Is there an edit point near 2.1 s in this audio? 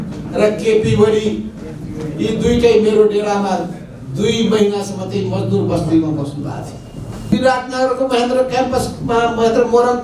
no; 1 cut; at 7.3 s

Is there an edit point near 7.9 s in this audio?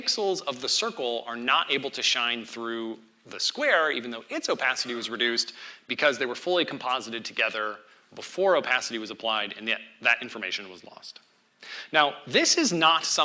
no; 0 cuts

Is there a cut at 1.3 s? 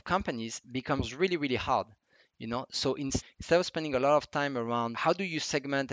no; 2 cuts; at 3.2 s, 4.9 s

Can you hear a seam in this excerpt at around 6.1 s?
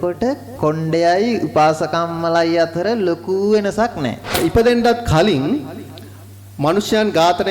no; 1 cut; at 4.4 s

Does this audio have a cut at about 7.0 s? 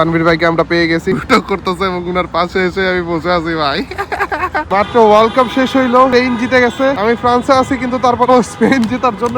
yes; 4 cuts; at 1.1 s, 4.6 s, 6.1 s, 7.0 s

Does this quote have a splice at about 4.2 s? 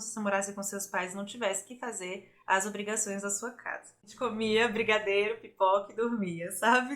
yes; 1 cut; at 4.2 s

